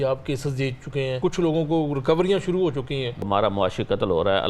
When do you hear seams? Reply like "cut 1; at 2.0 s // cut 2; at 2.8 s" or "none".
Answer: cut 1; at 1.2 s // cut 2; at 3.3 s